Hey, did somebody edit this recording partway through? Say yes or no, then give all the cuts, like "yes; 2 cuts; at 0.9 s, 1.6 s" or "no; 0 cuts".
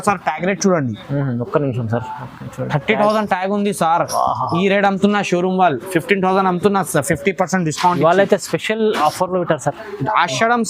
no; 0 cuts